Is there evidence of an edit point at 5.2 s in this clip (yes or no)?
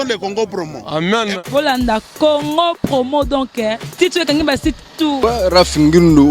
yes